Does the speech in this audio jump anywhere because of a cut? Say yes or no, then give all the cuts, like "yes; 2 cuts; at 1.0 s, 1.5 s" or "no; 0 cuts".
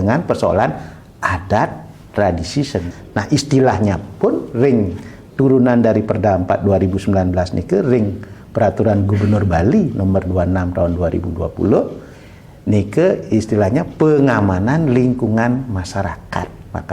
yes; 1 cut; at 2.9 s